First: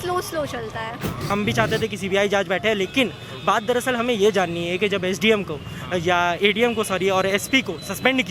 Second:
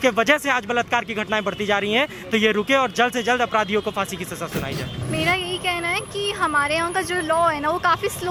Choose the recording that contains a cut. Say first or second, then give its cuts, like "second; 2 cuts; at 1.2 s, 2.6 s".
first; 1 cut; at 1.3 s